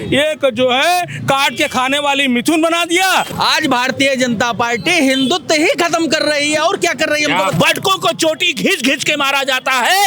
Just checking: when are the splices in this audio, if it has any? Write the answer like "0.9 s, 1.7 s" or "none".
3.3 s, 7.5 s